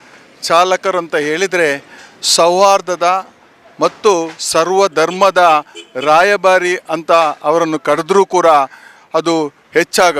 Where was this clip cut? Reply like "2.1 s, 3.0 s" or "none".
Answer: none